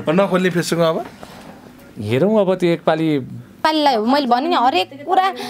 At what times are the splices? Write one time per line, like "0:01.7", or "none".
0:03.6

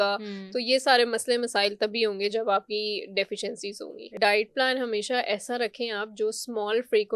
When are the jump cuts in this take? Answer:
0:04.2

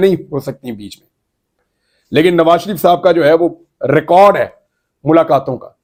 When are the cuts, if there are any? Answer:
none

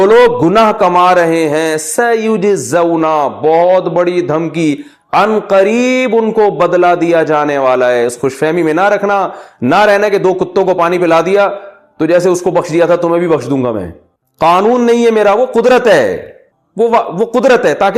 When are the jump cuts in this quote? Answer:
none

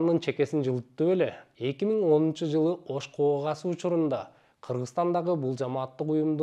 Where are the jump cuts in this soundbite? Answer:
0:01.4

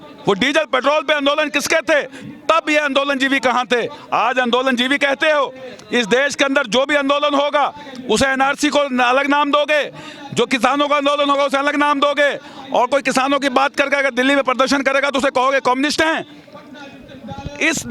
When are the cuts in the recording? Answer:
none

